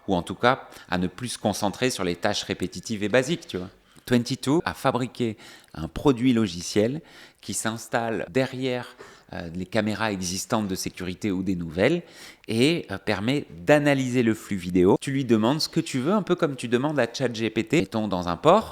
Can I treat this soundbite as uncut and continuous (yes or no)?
no